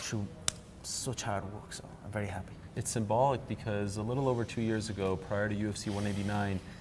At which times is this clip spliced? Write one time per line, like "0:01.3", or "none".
0:01.1

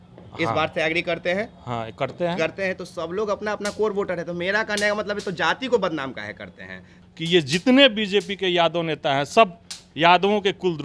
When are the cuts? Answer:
0:07.0

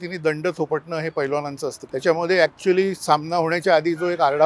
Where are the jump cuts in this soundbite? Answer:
0:01.8

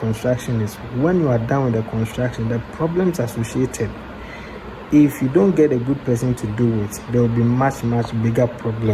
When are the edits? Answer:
none

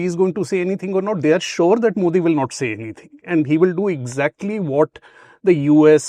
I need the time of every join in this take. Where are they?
none

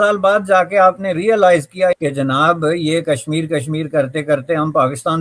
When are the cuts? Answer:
0:02.0

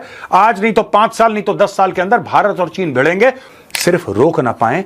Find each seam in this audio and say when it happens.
0:03.5

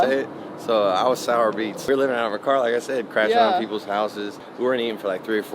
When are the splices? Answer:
0:01.8
0:04.5

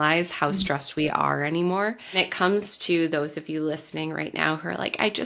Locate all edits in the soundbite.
0:02.3

